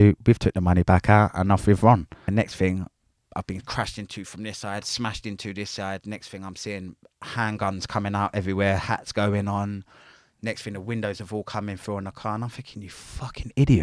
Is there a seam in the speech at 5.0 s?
no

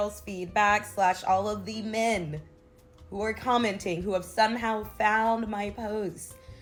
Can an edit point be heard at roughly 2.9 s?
no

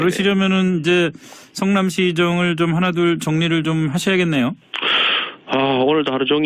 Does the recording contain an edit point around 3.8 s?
yes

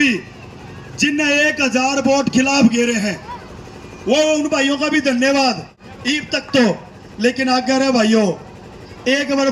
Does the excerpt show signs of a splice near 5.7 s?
no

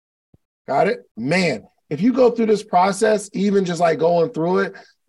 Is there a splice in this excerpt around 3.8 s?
no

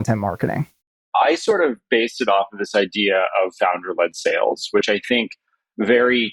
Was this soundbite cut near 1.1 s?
yes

